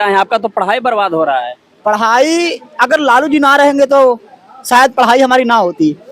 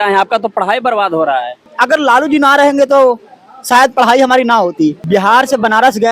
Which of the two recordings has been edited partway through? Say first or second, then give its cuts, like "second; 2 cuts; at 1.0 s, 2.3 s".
second; 2 cuts; at 1.6 s, 5.0 s